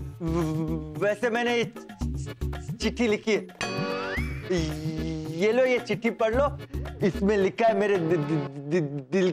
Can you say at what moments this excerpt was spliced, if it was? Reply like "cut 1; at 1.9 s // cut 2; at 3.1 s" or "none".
none